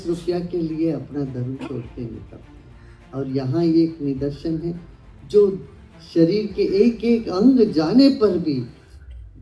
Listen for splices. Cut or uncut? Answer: uncut